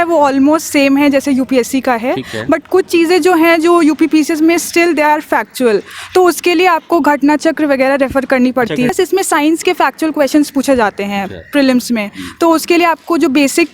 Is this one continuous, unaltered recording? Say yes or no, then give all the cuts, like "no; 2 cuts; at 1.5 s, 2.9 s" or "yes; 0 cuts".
no; 1 cut; at 8.9 s